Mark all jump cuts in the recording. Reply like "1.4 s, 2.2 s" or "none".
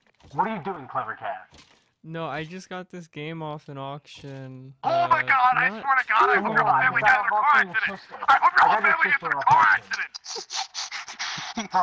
none